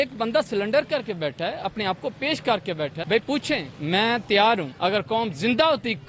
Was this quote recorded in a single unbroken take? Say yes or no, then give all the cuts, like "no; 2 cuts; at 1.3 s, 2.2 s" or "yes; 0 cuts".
no; 3 cuts; at 3.0 s, 3.7 s, 4.7 s